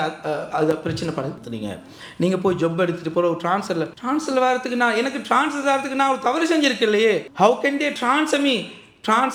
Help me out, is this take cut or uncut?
uncut